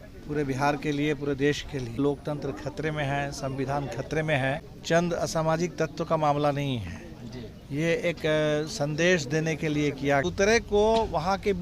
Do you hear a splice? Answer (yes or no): yes